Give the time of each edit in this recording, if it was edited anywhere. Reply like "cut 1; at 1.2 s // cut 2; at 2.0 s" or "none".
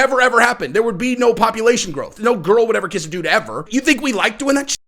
cut 1; at 2.1 s // cut 2; at 3.7 s